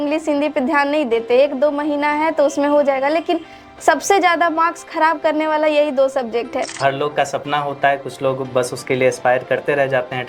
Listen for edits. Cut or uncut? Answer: cut